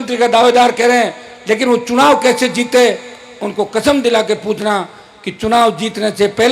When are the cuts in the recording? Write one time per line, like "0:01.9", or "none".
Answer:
none